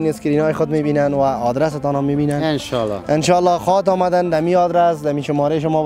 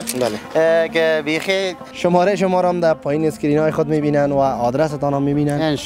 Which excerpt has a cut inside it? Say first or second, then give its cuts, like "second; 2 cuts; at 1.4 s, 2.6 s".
second; 1 cut; at 1.8 s